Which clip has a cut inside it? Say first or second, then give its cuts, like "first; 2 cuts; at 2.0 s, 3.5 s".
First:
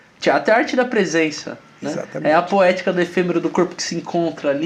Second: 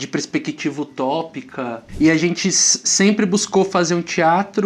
second; 1 cut; at 1.8 s